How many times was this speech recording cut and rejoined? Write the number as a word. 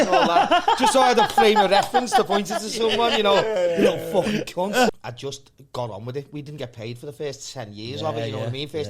one